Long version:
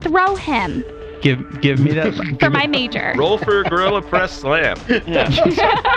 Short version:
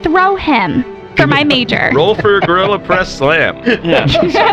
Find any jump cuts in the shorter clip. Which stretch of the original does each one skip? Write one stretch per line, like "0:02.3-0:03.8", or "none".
0:01.0-0:02.3